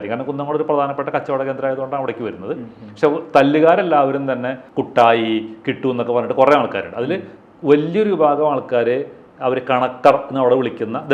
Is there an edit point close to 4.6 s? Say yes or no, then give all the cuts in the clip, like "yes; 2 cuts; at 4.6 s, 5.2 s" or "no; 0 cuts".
yes; 1 cut; at 4.6 s